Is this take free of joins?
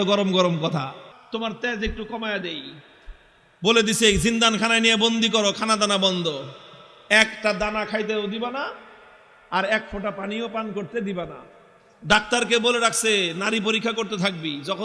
no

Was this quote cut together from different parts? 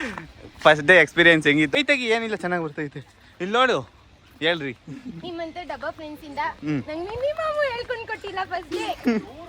yes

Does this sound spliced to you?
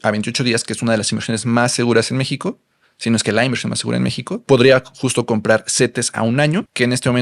yes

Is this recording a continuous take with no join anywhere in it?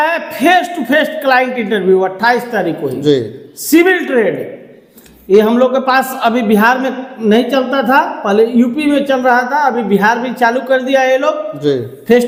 yes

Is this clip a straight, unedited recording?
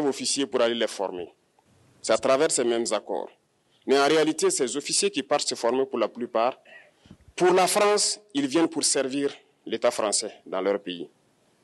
yes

